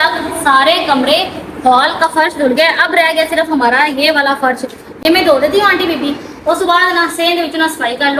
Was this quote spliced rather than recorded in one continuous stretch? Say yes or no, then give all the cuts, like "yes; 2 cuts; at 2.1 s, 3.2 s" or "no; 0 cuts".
no; 0 cuts